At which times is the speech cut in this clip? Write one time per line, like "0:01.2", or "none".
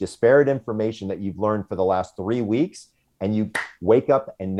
none